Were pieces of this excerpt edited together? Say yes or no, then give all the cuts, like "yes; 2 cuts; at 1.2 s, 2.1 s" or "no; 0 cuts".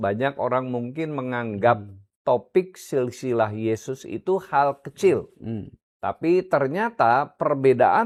no; 0 cuts